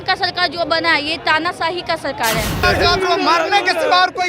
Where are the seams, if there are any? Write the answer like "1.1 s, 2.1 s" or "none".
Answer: 2.6 s